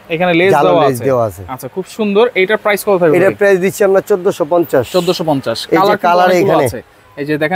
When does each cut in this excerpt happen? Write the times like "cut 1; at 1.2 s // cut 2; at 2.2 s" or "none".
none